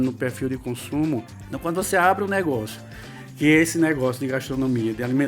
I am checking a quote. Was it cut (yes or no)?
yes